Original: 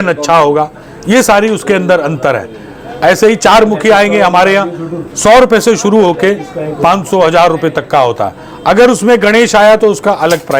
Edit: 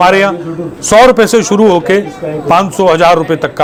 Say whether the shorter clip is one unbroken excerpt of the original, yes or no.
yes